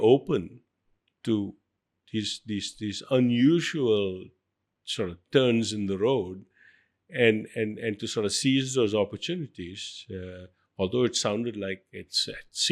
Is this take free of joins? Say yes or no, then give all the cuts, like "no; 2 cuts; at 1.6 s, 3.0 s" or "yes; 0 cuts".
yes; 0 cuts